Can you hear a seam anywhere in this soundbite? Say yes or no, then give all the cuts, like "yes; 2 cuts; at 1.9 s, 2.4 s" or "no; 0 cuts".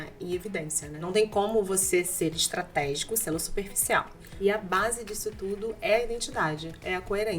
yes; 2 cuts; at 1.0 s, 4.3 s